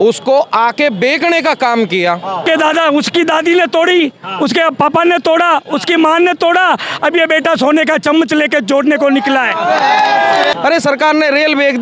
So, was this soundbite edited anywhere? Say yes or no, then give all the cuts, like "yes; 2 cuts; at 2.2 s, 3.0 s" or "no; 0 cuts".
yes; 2 cuts; at 2.4 s, 10.5 s